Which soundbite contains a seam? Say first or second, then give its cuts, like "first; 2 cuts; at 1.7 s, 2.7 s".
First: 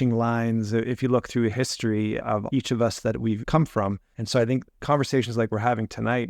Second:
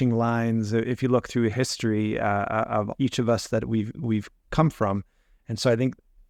first; 3 cuts; at 2.3 s, 3.6 s, 4.7 s